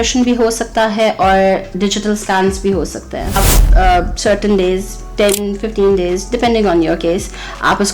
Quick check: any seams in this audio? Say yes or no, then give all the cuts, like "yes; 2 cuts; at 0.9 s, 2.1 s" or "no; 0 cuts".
yes; 1 cut; at 3.6 s